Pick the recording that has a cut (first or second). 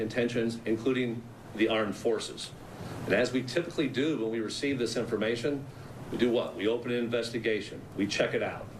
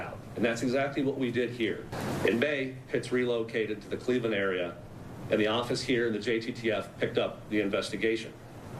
second